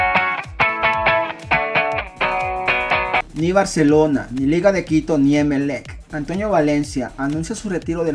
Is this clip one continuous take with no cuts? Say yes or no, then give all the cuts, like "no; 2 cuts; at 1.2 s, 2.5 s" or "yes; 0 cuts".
yes; 0 cuts